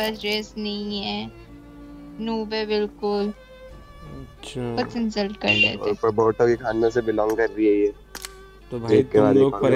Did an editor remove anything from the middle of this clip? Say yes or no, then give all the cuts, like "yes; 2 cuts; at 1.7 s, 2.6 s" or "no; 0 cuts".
yes; 1 cut; at 5.9 s